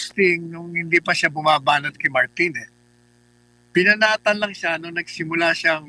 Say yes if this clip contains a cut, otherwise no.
no